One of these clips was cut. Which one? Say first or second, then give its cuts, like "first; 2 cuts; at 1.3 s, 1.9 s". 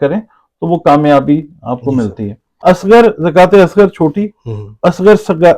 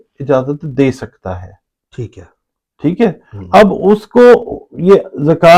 first; 1 cut; at 2.6 s